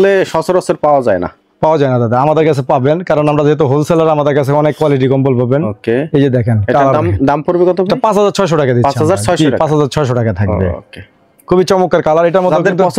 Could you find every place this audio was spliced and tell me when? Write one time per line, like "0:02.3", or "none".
none